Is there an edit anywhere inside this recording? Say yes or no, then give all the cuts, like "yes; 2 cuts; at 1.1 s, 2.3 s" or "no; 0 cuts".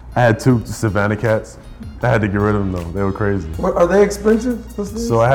yes; 1 cut; at 1.8 s